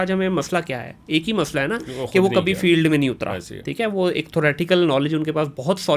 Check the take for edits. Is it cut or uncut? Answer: uncut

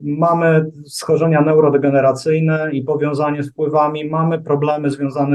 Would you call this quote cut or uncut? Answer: uncut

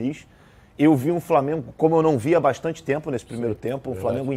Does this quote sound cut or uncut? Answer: uncut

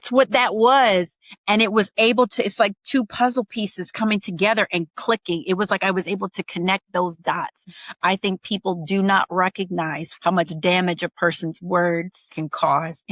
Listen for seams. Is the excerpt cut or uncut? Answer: cut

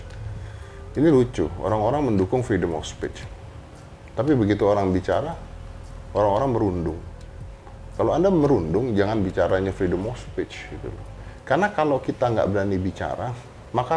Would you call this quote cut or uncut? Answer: uncut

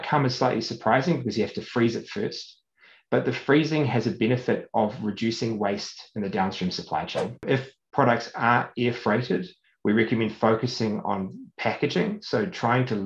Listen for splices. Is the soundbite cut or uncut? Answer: cut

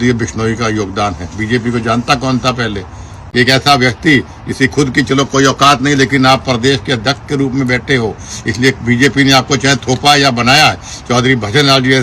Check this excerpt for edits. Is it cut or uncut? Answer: cut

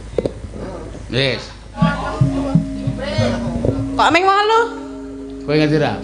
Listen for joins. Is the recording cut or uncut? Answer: cut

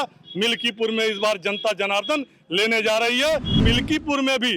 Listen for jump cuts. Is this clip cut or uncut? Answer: cut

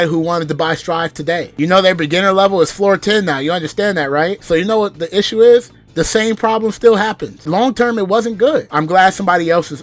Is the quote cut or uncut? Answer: cut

